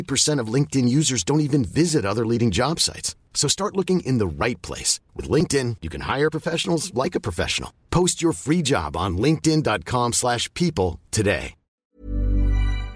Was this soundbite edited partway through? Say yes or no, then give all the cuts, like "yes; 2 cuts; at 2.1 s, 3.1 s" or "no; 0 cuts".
yes; 1 cut; at 11.8 s